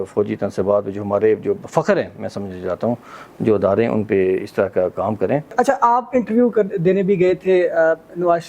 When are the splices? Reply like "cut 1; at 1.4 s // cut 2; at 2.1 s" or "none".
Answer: cut 1; at 5.5 s